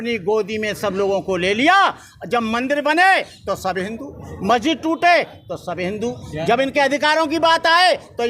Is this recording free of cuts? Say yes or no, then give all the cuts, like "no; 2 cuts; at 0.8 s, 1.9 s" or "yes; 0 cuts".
yes; 0 cuts